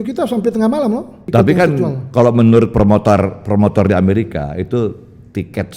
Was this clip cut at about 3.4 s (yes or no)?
no